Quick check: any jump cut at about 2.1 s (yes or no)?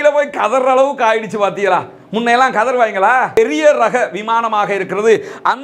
no